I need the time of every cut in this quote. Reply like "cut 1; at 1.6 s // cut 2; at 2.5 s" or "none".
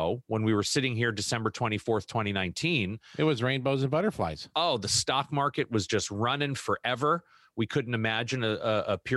none